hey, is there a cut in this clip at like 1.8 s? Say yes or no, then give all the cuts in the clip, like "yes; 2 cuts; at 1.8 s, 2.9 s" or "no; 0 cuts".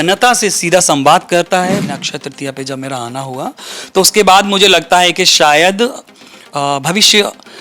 yes; 1 cut; at 1.8 s